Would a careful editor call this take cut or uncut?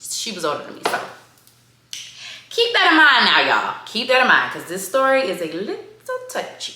uncut